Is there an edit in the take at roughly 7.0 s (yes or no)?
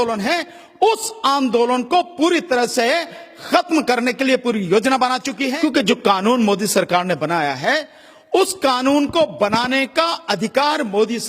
no